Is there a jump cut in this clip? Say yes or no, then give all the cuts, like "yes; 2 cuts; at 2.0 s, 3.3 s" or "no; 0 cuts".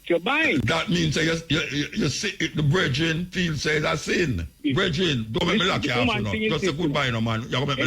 yes; 1 cut; at 4.6 s